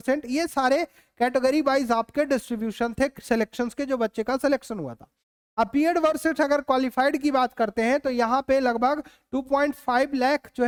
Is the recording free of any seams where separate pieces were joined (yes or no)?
yes